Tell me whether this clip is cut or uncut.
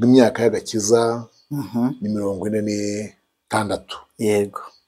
uncut